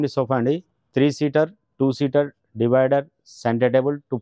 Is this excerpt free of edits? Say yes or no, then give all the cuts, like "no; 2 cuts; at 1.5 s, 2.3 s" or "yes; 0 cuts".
yes; 0 cuts